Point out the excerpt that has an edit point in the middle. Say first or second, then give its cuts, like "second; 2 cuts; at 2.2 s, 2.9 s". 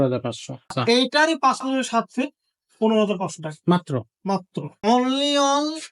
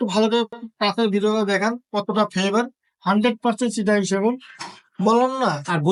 first; 2 cuts; at 0.8 s, 4.7 s